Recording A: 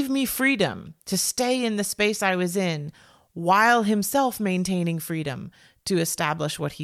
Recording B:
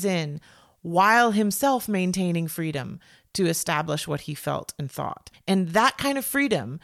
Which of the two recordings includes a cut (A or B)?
B